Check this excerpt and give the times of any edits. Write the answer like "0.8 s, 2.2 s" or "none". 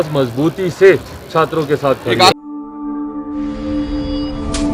2.3 s